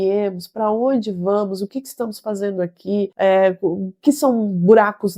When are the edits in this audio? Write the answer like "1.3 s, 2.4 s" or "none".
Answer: 3.1 s